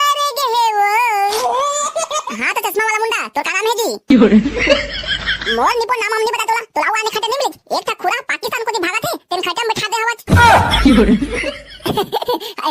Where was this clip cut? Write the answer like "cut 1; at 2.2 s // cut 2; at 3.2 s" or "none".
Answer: cut 1; at 2.3 s